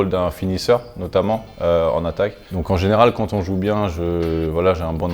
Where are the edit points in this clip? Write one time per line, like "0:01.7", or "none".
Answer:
0:02.5